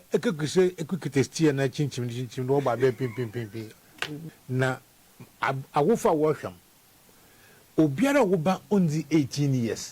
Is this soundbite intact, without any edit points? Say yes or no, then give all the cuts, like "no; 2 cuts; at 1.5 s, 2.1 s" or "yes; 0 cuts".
no; 1 cut; at 4.2 s